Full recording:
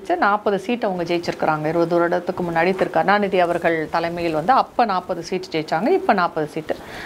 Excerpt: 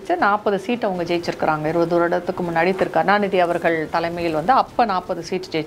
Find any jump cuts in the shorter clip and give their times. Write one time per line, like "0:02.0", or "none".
none